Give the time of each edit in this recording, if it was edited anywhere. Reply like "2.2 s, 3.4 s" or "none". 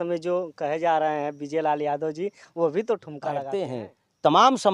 3.4 s